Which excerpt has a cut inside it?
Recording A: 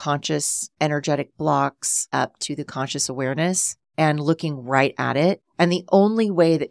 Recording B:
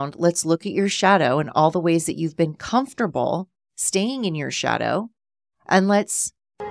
A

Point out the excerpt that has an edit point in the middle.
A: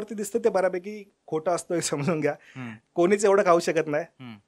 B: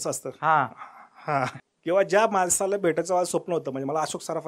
B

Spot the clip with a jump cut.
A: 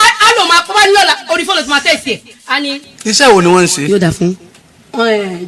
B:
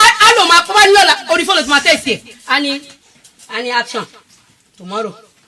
A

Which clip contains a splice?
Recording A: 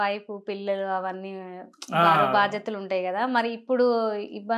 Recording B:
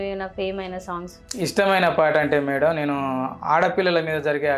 B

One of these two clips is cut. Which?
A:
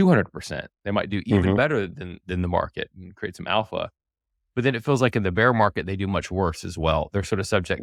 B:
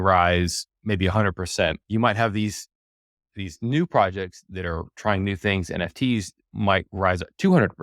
B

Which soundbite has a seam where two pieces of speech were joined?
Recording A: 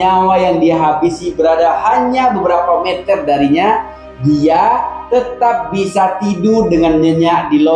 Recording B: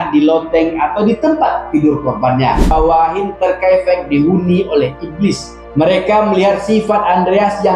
B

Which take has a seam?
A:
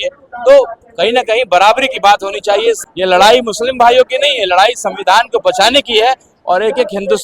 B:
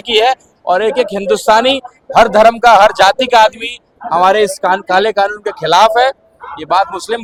A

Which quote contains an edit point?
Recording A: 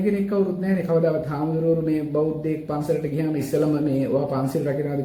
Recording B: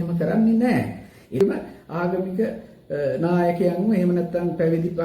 B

